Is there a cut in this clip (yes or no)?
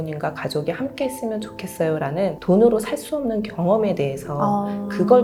no